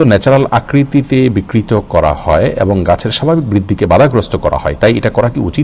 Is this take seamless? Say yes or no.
yes